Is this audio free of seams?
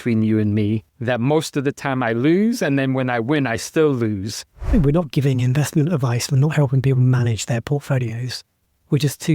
no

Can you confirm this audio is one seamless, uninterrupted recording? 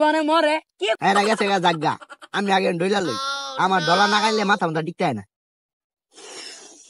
no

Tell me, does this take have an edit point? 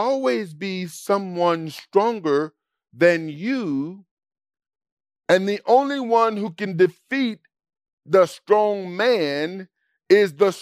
no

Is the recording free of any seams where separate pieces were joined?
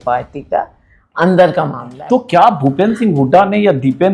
no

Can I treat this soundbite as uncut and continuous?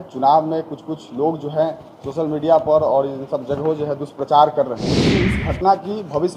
no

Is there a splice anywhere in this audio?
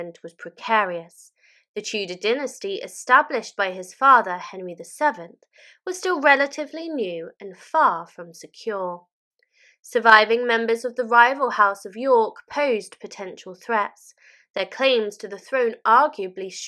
no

